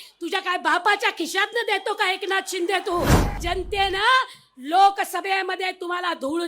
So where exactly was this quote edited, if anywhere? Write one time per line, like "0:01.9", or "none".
0:03.4

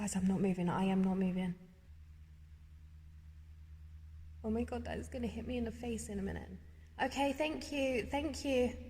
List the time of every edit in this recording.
0:01.9

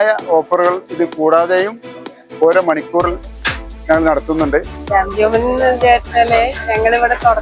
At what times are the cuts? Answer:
0:04.8

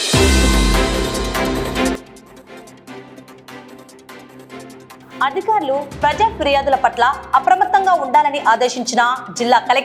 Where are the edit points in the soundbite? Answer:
none

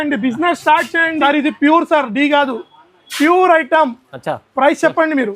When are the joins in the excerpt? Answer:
0:01.1

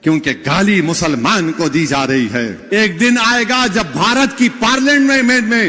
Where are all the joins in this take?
0:02.6

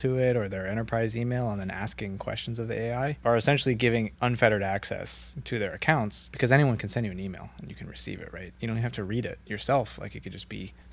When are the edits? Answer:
none

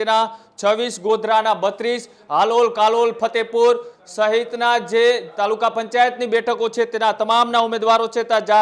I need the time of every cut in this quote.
none

